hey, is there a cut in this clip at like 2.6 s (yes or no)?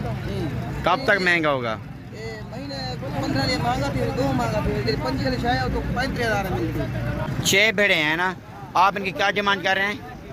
no